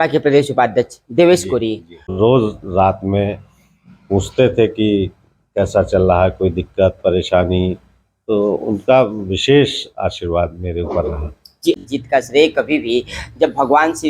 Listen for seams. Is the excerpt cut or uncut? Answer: cut